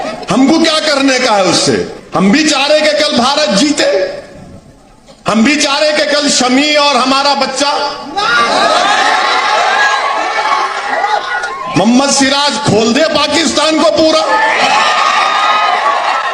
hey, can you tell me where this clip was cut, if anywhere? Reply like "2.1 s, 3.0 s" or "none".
2.0 s